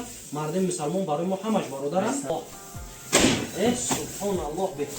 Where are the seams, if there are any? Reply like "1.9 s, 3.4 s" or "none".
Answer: 2.3 s